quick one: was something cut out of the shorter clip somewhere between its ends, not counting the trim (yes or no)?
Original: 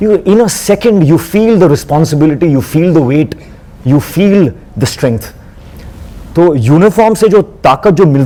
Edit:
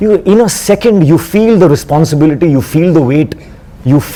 no